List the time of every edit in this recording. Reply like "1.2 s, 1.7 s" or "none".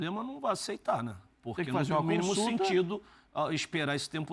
none